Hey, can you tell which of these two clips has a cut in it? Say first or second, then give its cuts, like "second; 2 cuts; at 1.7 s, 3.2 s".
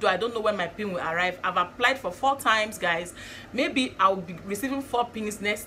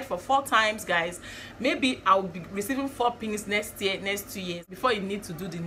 second; 1 cut; at 4.7 s